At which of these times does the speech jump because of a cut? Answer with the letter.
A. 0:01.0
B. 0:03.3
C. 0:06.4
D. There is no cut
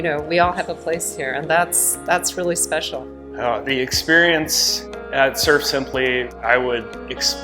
B